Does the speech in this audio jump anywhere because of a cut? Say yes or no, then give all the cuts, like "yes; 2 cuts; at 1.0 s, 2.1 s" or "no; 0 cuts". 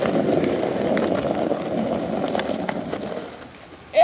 no; 0 cuts